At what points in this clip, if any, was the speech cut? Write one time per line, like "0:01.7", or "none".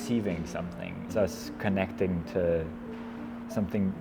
0:01.1

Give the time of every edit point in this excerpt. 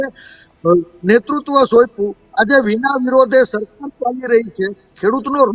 none

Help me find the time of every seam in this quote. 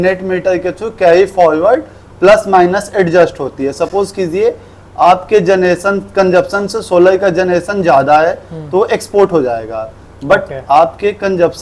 none

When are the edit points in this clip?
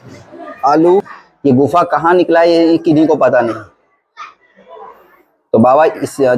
0:01.2

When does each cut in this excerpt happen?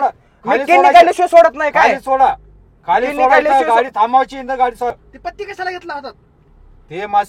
0:05.0

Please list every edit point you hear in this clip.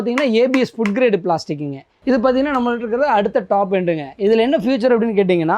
0:01.9

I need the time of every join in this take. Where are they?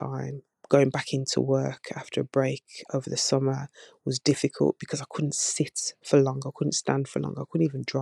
none

